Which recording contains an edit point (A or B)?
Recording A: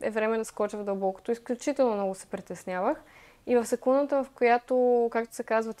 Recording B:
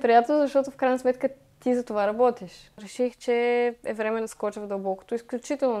B